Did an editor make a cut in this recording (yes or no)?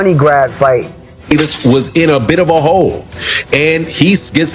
yes